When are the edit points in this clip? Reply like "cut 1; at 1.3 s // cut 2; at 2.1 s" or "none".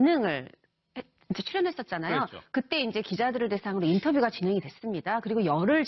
none